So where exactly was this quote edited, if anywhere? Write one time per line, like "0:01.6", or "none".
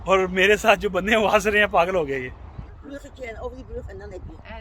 0:02.7